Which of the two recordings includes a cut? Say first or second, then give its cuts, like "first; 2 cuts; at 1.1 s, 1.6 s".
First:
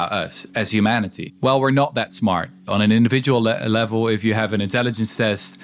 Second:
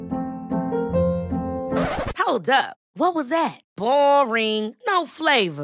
first; 2 cuts; at 1.2 s, 2.6 s